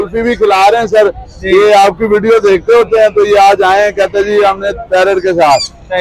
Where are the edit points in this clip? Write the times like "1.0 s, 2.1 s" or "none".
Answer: none